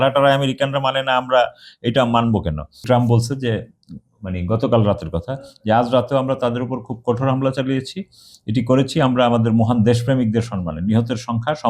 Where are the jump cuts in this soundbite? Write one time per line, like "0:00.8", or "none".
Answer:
0:02.8